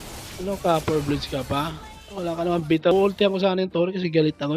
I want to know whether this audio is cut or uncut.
cut